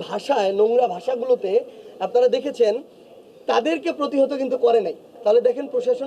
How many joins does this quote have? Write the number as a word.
one